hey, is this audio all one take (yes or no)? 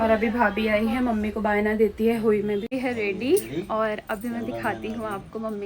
no